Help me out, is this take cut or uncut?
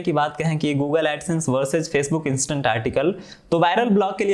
uncut